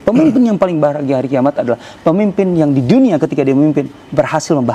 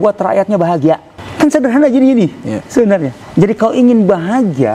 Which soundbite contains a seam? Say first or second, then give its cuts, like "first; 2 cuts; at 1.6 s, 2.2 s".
second; 2 cuts; at 1.2 s, 3.6 s